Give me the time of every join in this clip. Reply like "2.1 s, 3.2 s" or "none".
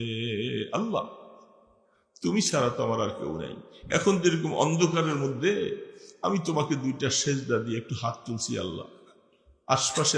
none